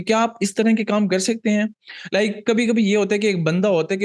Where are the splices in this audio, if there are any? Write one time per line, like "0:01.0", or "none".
none